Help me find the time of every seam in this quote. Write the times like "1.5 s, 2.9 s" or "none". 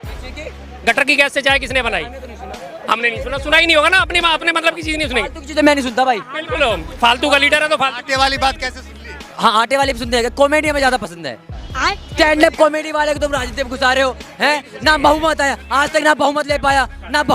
11.6 s